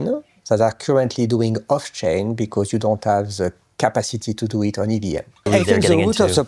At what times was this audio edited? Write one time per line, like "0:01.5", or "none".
0:05.5